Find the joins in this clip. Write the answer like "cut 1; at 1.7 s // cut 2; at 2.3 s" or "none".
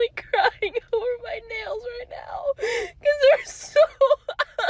none